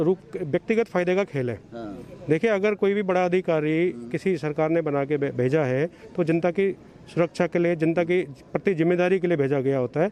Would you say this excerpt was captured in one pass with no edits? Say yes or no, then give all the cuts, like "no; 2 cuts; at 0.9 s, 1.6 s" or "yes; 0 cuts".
yes; 0 cuts